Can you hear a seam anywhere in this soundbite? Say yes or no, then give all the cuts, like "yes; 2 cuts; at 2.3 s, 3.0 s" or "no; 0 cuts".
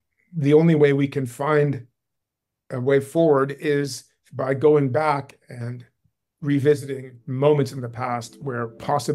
no; 0 cuts